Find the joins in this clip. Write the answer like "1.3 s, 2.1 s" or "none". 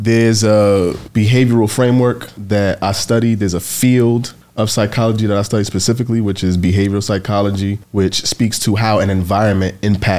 1.0 s, 2.3 s, 4.4 s, 7.8 s